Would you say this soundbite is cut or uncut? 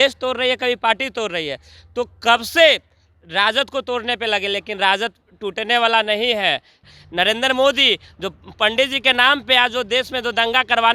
cut